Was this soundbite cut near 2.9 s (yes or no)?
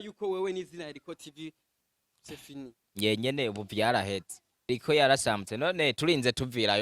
no